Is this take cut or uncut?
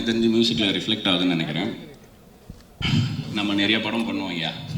uncut